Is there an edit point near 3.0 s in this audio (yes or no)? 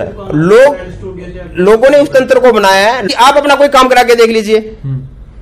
yes